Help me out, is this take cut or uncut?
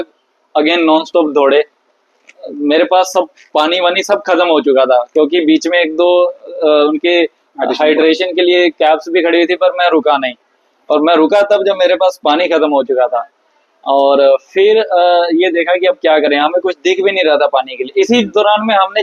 uncut